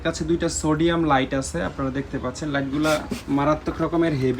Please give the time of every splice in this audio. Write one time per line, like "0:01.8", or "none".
none